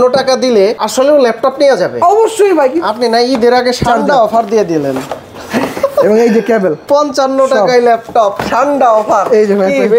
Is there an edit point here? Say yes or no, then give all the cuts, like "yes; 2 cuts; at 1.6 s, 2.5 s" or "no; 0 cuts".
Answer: yes; 2 cuts; at 2.8 s, 6.8 s